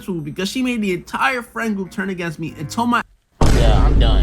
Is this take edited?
yes; 1 cut; at 3.2 s

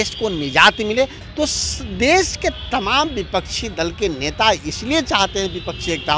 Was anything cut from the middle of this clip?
yes; 1 cut; at 1.2 s

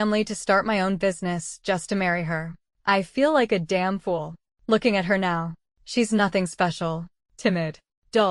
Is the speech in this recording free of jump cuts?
no; 1 cut; at 7.4 s

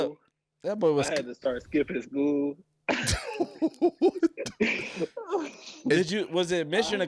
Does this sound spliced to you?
no; 0 cuts

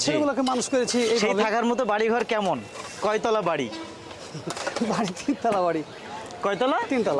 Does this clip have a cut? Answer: no; 0 cuts

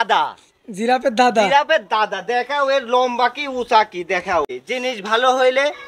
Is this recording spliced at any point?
yes; 1 cut; at 4.5 s

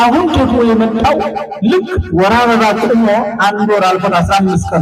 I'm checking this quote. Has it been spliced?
no; 0 cuts

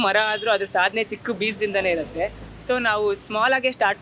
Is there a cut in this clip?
no; 0 cuts

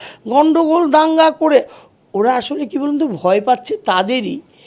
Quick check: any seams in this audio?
no; 0 cuts

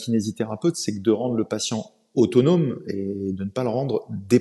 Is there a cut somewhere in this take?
no; 0 cuts

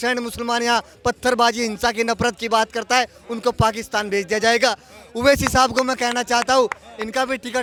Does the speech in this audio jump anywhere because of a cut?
no; 0 cuts

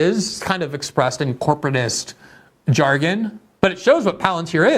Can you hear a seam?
yes; 1 cut; at 3.4 s

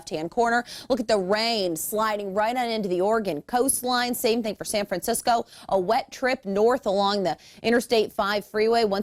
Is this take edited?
no; 0 cuts

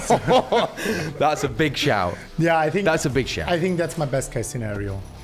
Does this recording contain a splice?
no; 0 cuts

